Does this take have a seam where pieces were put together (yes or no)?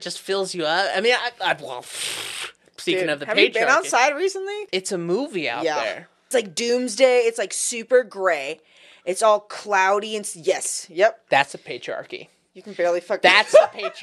yes